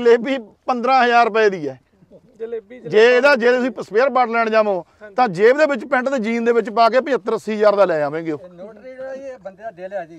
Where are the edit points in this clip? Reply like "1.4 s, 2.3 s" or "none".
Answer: none